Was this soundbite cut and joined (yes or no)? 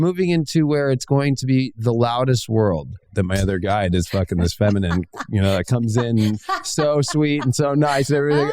yes